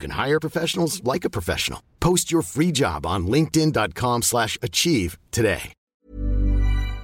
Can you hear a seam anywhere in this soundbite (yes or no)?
yes